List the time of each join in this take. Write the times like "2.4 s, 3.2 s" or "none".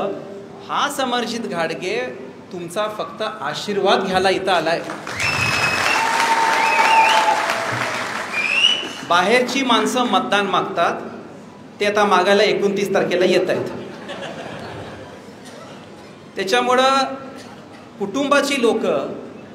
none